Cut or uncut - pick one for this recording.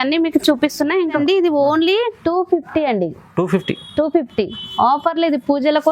cut